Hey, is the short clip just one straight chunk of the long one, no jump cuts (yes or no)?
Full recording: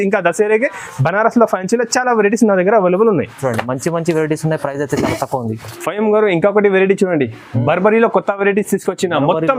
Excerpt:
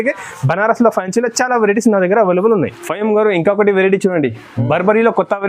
no